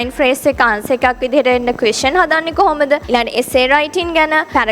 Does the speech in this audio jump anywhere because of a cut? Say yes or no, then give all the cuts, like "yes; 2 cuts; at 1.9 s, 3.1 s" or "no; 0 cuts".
yes; 1 cut; at 3.0 s